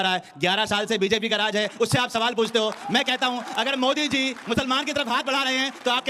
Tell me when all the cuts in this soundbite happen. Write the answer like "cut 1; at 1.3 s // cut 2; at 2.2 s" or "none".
none